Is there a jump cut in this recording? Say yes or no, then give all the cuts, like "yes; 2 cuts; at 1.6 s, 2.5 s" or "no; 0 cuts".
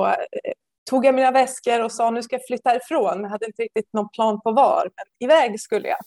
no; 0 cuts